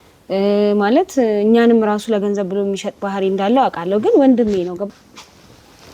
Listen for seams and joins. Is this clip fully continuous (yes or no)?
no